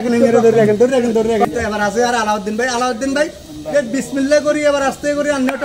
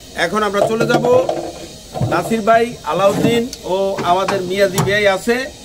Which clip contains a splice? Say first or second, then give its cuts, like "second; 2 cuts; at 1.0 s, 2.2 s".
first; 1 cut; at 1.4 s